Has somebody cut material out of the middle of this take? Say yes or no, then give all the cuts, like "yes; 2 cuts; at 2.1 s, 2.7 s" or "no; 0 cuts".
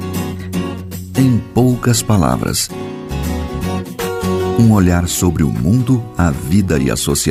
no; 0 cuts